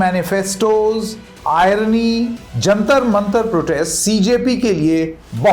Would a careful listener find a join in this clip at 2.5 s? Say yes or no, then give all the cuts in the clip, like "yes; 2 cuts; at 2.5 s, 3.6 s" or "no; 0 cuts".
yes; 1 cut; at 2.5 s